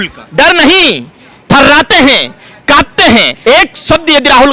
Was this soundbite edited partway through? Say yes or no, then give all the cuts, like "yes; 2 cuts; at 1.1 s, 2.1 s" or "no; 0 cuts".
yes; 1 cut; at 3.3 s